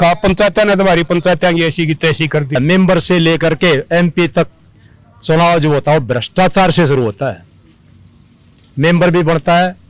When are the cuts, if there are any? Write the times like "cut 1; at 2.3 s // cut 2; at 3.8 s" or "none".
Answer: cut 1; at 2.6 s